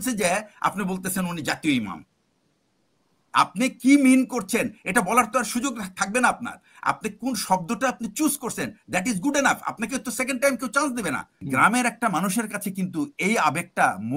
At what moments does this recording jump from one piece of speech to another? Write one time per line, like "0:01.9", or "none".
0:11.3